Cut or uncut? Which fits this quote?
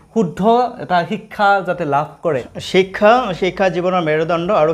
cut